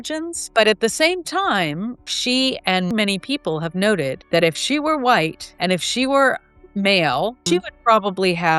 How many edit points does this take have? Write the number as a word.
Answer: three